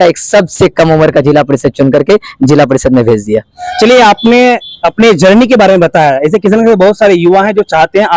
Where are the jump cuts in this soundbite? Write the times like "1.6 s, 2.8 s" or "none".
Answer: none

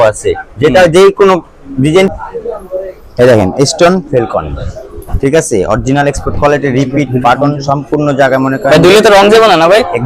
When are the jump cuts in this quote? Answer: 2.1 s

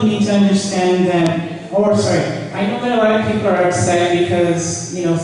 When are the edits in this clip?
1.8 s

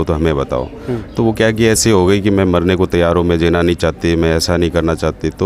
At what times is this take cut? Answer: none

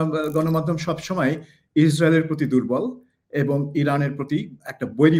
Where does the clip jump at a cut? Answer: none

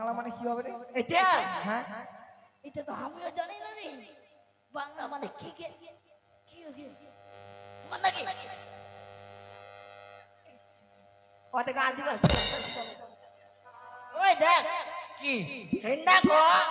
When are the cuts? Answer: 10.2 s

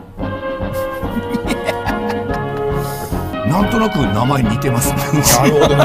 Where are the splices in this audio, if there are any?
3.4 s

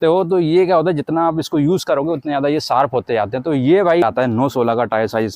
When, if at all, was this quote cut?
4.0 s

